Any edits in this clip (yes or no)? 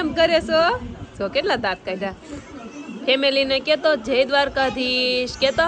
no